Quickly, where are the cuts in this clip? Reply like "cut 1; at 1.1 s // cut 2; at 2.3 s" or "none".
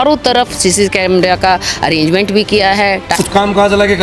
cut 1; at 3.1 s